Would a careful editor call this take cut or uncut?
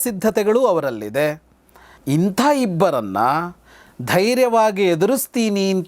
cut